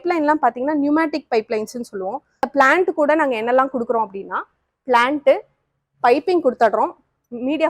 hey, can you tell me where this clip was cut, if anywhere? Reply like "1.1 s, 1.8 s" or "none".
2.4 s

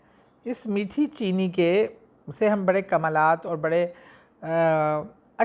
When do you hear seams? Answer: none

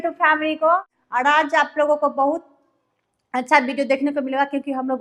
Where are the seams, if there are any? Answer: 1.0 s

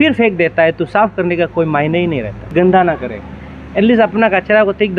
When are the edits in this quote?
2.5 s

